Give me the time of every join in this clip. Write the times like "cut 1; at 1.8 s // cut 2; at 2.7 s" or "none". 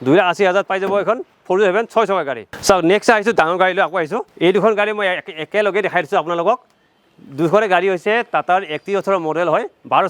none